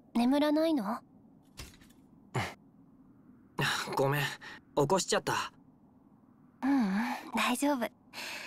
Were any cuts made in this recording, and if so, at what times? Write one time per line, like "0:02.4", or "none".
none